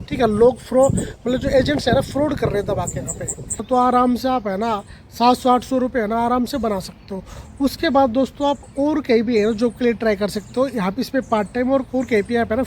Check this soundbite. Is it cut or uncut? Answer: cut